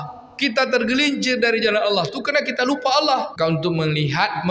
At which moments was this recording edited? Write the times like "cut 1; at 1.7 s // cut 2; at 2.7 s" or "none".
cut 1; at 3.3 s